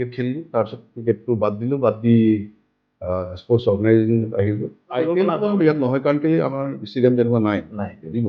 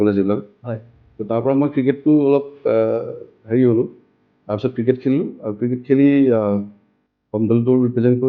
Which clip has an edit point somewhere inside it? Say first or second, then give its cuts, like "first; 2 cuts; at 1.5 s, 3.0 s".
first; 1 cut; at 4.9 s